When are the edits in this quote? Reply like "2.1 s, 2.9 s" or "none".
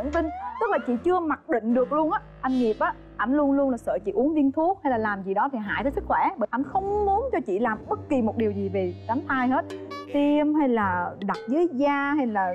none